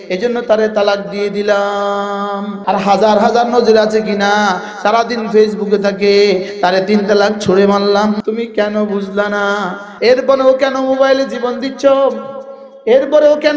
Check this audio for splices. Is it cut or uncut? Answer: cut